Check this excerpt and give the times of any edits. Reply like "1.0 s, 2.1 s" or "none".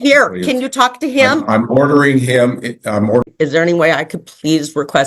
3.2 s